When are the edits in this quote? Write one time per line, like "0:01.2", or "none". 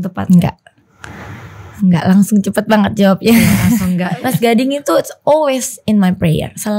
0:04.1